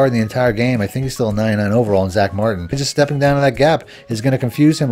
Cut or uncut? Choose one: cut